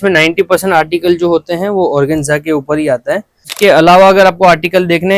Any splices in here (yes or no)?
yes